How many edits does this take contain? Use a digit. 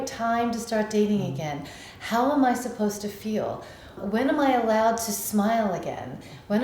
1